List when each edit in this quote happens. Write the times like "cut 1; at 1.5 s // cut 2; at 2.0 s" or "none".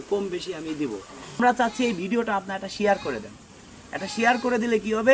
cut 1; at 1.4 s